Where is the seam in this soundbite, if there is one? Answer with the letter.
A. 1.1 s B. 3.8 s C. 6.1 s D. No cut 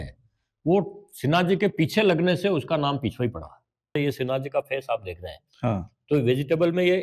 B